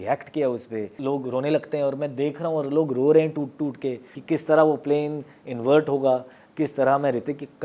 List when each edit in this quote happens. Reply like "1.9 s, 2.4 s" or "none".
1.0 s, 4.1 s